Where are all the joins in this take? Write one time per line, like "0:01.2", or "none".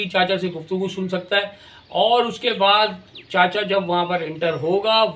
none